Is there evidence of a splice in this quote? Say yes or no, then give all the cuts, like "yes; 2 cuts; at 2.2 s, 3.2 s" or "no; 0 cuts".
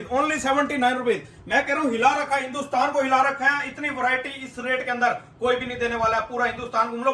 no; 0 cuts